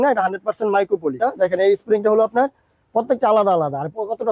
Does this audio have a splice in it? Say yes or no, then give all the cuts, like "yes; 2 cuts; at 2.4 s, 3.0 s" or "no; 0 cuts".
yes; 1 cut; at 1.3 s